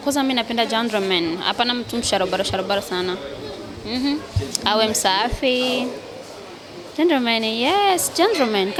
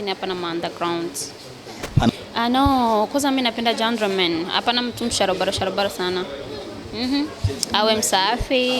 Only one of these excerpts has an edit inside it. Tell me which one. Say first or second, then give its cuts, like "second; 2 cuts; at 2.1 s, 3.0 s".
second; 1 cut; at 2.1 s